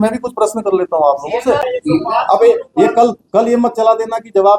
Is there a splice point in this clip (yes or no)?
yes